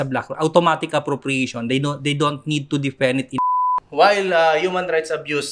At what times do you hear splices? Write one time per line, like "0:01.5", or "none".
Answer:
0:03.4